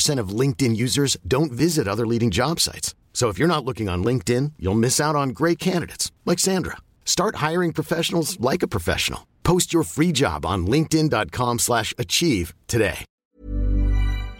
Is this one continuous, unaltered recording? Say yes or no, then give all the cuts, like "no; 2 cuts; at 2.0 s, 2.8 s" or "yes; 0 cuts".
no; 1 cut; at 13.2 s